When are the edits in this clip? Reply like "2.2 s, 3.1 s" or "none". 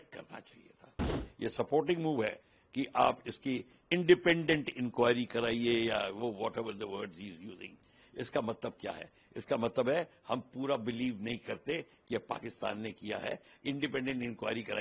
1.1 s